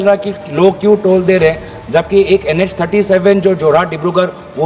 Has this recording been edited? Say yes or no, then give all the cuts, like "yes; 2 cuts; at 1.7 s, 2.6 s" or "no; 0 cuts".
no; 0 cuts